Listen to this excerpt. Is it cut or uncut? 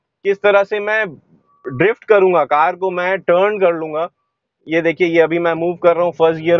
uncut